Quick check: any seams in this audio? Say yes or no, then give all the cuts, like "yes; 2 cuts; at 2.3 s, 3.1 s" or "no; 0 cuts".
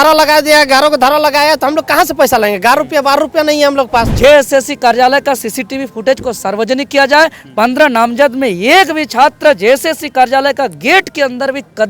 yes; 1 cut; at 4.1 s